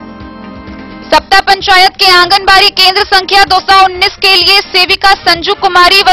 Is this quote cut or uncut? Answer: cut